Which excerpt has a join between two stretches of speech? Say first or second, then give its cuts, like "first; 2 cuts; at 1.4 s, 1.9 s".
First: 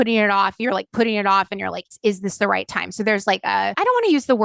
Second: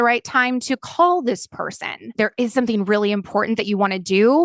second; 1 cut; at 2.1 s